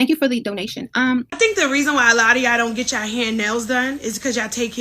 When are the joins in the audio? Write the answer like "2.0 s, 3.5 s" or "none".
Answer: 1.3 s